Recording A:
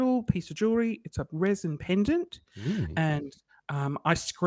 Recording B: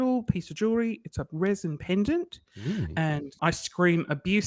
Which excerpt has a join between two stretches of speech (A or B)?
B